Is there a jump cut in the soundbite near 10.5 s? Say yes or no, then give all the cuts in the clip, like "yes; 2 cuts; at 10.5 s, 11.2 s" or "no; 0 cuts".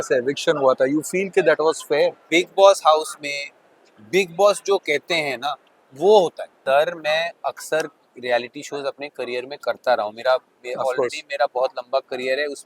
no; 2 cuts; at 2.2 s, 6.6 s